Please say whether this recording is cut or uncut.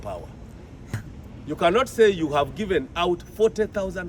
cut